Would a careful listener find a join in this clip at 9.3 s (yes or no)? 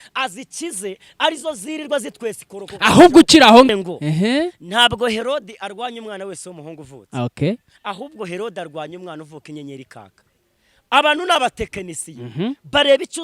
no